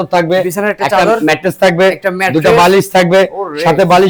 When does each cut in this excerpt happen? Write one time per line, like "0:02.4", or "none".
none